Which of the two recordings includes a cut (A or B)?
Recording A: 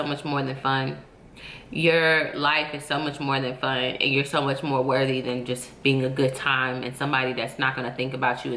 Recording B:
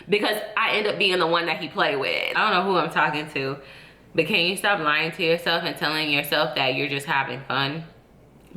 B